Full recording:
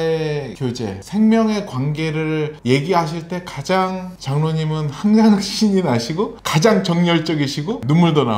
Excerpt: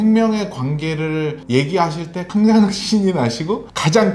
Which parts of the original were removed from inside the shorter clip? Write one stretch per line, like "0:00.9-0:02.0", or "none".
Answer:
0:03.4-0:04.9